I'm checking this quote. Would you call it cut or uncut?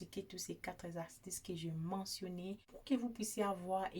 cut